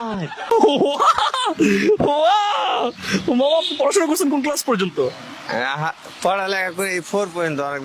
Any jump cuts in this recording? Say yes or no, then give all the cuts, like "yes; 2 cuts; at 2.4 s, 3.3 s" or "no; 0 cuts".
no; 0 cuts